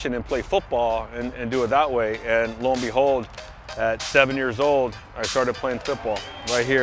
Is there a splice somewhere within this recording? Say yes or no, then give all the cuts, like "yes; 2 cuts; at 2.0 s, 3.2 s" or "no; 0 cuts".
no; 0 cuts